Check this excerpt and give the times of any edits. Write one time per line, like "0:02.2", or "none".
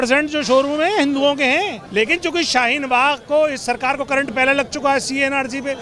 0:01.8